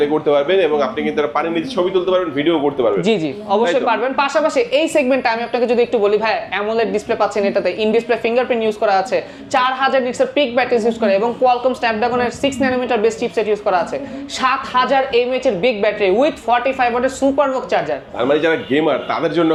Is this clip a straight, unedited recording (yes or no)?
yes